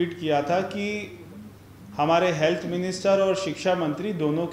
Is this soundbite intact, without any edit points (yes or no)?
yes